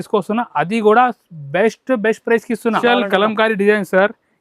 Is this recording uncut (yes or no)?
no